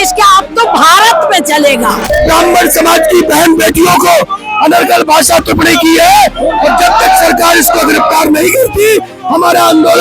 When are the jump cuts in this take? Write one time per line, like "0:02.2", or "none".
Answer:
0:02.0